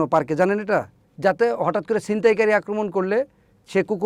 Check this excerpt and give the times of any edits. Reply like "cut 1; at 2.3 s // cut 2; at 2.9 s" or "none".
cut 1; at 1.0 s